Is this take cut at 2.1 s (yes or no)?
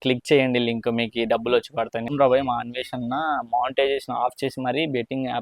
yes